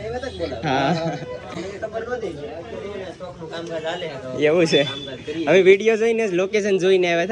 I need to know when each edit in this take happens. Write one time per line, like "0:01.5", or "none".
none